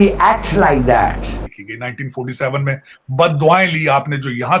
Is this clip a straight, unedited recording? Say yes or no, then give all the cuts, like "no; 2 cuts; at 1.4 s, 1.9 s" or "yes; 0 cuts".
no; 1 cut; at 1.5 s